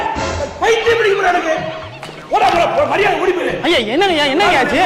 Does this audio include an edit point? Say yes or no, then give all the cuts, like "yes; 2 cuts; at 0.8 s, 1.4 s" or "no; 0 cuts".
no; 0 cuts